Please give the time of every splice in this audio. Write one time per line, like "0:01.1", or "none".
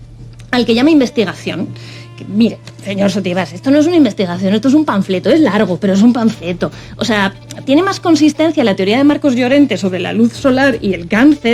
none